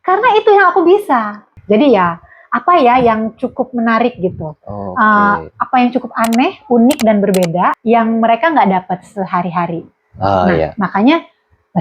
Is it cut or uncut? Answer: cut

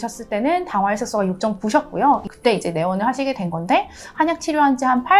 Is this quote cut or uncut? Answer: cut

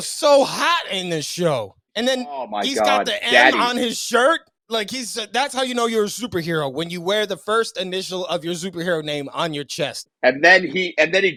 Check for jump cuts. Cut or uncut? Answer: uncut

